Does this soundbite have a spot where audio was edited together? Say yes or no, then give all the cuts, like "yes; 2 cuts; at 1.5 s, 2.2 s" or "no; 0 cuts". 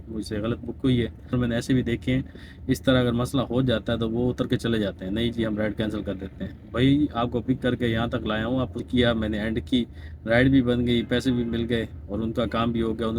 yes; 2 cuts; at 1.3 s, 8.8 s